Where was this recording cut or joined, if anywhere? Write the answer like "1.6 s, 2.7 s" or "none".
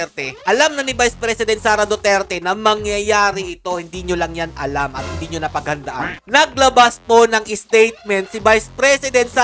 6.2 s